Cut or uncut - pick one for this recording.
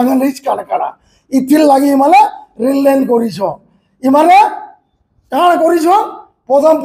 uncut